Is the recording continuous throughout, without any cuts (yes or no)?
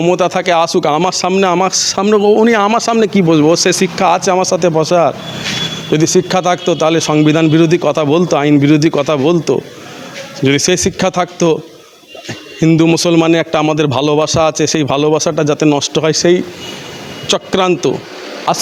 yes